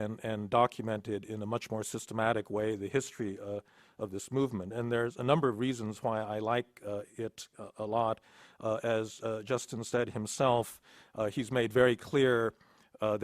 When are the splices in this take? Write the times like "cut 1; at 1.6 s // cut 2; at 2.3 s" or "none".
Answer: cut 1; at 8.0 s